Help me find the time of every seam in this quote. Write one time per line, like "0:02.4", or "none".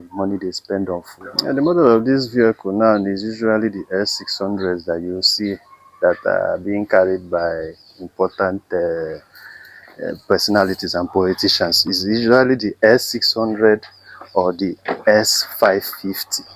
0:01.3